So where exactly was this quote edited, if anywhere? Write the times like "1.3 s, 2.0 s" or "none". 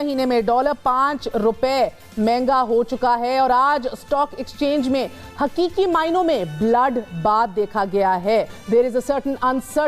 8.6 s